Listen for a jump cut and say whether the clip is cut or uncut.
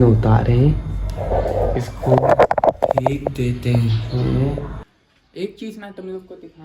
cut